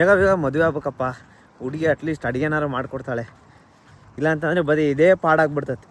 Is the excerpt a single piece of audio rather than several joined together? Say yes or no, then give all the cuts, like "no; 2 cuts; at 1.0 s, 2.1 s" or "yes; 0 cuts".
yes; 0 cuts